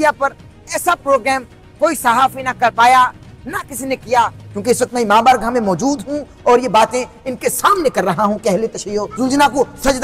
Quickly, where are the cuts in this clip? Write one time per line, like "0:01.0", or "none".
0:04.4
0:09.1